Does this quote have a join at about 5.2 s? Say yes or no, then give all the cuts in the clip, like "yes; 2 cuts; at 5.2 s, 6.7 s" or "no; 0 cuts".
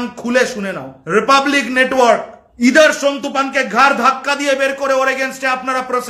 no; 2 cuts; at 0.9 s, 2.4 s